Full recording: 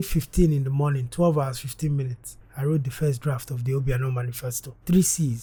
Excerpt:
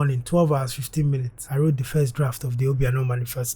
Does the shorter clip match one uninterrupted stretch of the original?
no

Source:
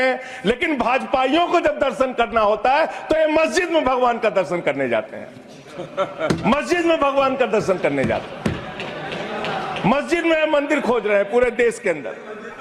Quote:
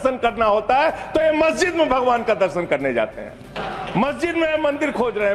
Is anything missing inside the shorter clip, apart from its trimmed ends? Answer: yes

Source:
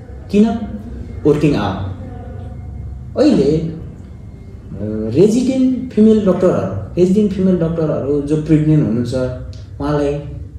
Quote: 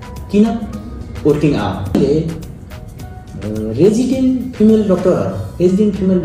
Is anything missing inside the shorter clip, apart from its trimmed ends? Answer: yes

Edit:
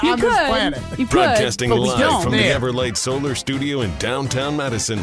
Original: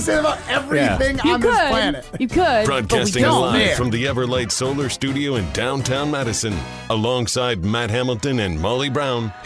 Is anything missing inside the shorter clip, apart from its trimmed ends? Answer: yes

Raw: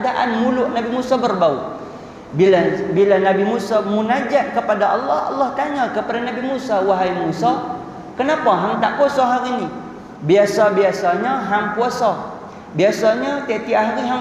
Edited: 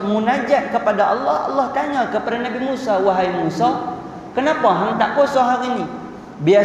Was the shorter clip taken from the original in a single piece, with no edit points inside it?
yes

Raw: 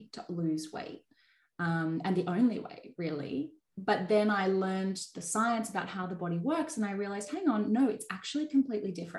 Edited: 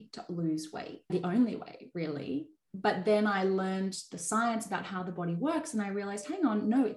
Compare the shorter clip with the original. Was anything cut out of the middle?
yes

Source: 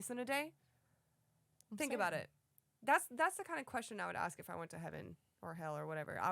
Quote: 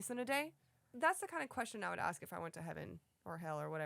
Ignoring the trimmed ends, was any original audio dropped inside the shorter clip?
yes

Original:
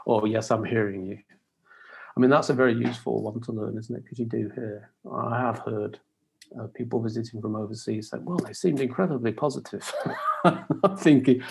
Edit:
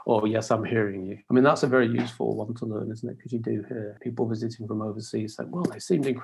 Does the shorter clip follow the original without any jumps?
no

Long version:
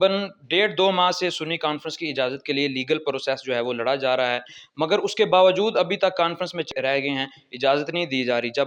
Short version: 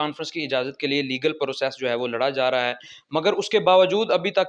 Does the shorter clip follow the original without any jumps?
yes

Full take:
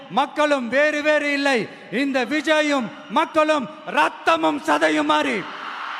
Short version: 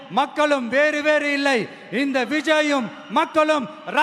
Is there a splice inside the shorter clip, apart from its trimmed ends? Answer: no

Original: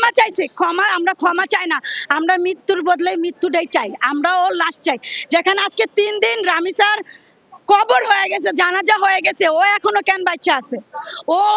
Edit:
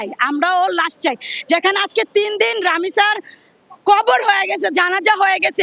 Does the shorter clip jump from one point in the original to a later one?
no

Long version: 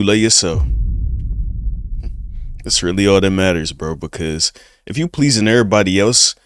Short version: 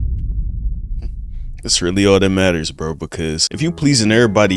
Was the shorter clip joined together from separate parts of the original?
yes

